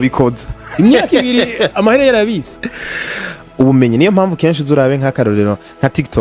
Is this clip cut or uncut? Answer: cut